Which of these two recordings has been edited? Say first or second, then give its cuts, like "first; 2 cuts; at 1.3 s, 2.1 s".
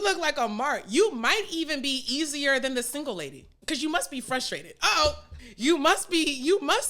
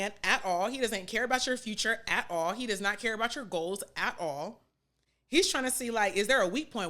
first; 2 cuts; at 3.6 s, 5.3 s